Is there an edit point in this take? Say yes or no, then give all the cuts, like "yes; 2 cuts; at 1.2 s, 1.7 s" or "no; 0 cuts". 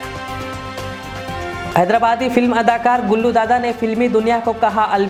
no; 0 cuts